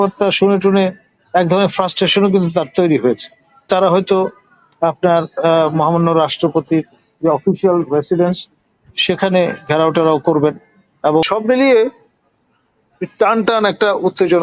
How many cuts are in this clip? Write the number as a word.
two